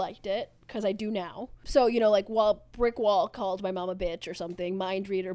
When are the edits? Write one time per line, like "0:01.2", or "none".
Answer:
0:01.5